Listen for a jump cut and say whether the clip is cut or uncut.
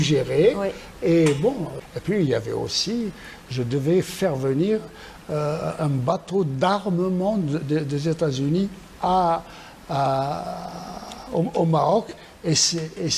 cut